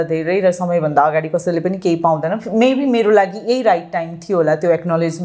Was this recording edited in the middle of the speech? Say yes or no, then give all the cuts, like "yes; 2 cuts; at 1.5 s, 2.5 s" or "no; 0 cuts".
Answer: no; 0 cuts